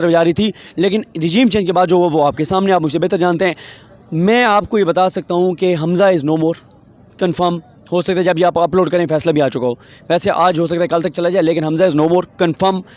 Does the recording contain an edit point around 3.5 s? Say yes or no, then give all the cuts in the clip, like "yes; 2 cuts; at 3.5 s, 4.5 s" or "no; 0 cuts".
no; 0 cuts